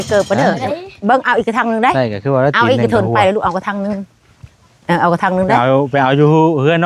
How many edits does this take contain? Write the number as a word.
zero